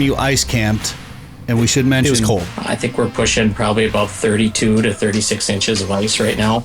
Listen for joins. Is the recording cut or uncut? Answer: cut